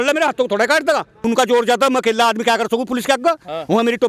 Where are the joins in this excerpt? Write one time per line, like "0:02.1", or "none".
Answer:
0:01.2